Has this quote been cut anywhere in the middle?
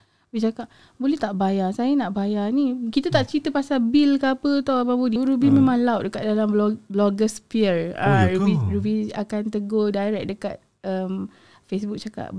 yes; 1 cut; at 5.2 s

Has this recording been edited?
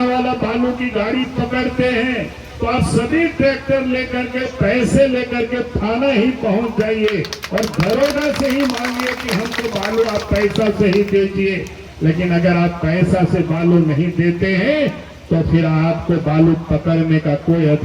no; 0 cuts

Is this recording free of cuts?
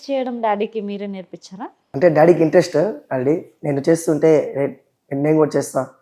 no; 1 cut; at 1.9 s

